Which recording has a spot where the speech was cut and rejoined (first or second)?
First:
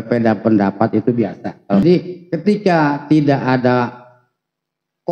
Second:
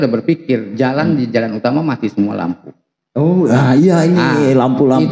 first